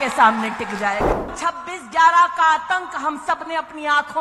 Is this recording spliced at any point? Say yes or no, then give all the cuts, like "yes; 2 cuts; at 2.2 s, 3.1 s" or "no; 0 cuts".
yes; 1 cut; at 1.3 s